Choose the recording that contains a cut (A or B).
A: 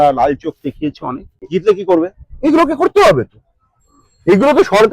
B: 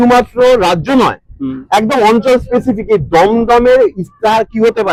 A